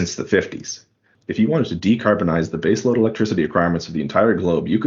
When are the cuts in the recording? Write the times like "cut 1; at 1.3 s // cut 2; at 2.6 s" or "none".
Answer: cut 1; at 1.1 s